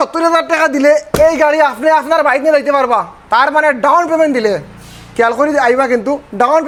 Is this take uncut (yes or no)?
yes